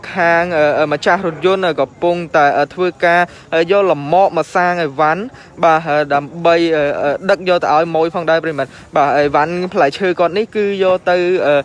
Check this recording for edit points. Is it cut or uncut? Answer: uncut